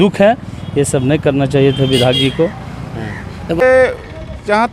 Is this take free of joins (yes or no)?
no